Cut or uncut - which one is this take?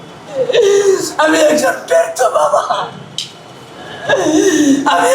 uncut